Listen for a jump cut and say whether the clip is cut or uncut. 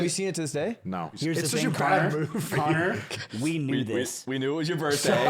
cut